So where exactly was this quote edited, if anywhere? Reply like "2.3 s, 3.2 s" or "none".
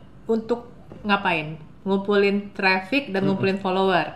none